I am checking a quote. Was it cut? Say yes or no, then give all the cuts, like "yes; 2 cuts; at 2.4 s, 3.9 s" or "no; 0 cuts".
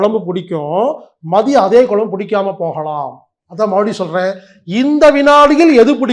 no; 0 cuts